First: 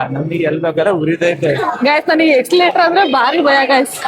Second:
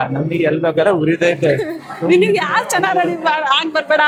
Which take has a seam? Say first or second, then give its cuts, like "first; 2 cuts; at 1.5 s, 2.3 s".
first; 1 cut; at 1.7 s